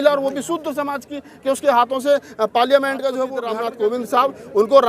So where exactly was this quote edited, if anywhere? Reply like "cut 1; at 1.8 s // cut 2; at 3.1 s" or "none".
cut 1; at 3.4 s

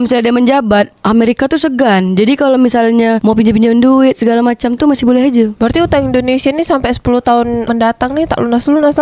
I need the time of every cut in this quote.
none

